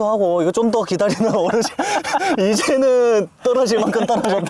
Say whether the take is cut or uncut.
uncut